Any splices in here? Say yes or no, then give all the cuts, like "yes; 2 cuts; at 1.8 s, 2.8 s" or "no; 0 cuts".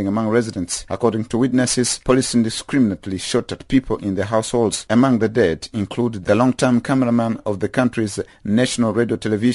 no; 0 cuts